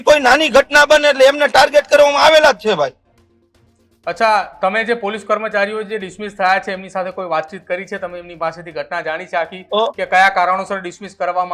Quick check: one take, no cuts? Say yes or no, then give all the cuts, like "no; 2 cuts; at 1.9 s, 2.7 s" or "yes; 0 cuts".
yes; 0 cuts